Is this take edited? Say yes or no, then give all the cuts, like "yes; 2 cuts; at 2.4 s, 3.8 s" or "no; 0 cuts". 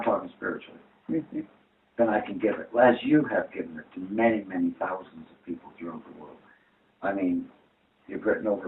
no; 0 cuts